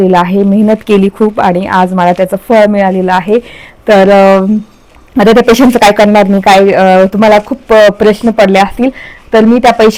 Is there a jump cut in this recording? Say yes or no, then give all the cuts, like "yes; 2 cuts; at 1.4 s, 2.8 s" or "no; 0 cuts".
no; 0 cuts